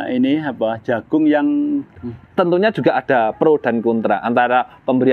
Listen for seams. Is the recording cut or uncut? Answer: cut